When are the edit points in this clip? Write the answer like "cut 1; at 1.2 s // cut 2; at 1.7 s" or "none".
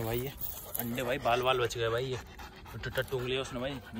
none